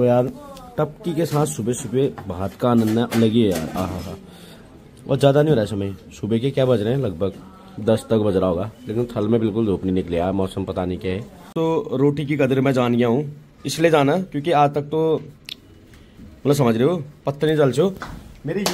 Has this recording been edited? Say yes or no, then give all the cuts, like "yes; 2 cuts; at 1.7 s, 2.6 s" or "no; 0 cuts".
no; 0 cuts